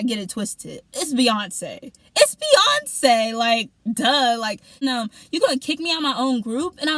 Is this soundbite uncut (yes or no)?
no